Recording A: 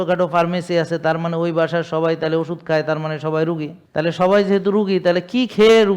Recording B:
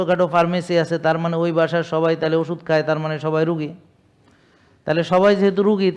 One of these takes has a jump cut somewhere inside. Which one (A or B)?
A